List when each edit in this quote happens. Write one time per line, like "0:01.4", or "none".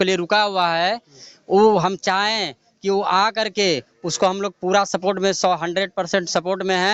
none